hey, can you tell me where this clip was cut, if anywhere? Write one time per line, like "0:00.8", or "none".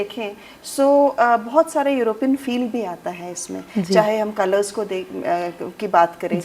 none